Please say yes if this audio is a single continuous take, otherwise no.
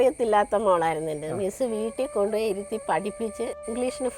yes